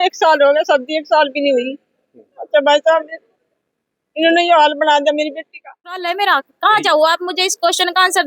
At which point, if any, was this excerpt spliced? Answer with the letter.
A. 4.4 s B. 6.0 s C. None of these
B